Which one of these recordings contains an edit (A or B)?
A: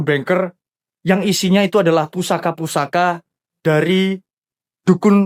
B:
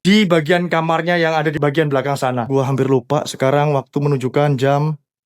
B